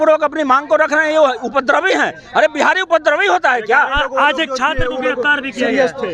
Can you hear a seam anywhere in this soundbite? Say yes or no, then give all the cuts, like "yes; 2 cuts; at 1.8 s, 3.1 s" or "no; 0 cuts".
no; 0 cuts